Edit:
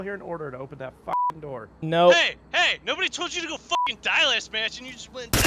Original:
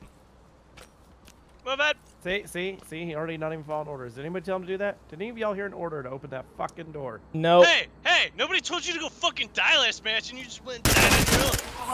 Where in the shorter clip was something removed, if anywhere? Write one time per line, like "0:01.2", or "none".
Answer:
none

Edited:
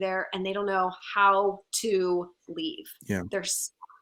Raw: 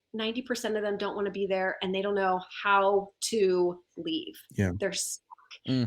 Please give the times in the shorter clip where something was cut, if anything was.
none

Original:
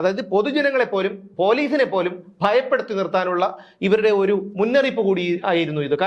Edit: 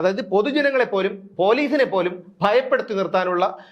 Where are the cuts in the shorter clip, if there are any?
none

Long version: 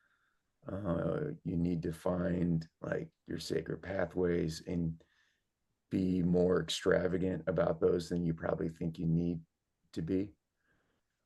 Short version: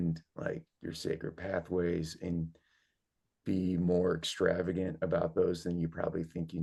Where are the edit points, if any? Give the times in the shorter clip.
none

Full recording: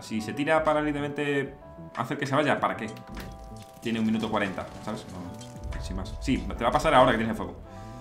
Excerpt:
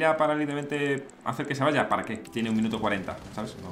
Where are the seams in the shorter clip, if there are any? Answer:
0:01.2
0:02.2

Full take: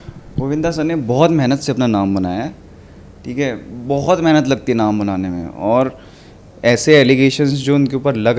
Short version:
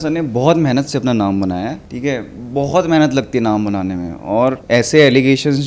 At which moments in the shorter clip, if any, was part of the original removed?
0:01.9
0:04.6

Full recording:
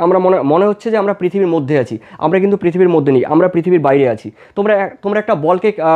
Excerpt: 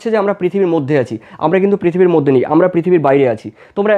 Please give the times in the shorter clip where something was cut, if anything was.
none

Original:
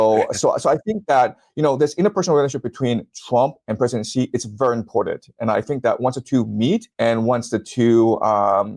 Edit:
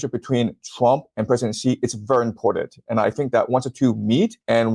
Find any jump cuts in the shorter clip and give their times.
none

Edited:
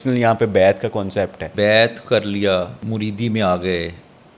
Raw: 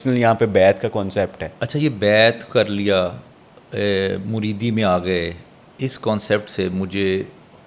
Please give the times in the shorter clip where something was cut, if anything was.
0:01.5
0:02.8

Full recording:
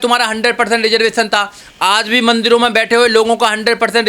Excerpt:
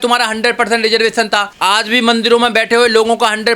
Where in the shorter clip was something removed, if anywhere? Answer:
0:01.5

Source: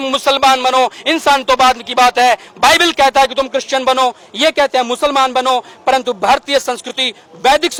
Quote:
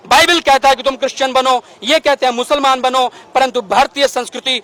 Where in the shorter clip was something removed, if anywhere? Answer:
none

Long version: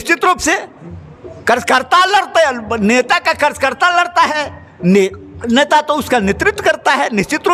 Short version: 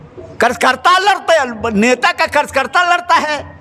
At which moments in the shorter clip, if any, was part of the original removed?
none

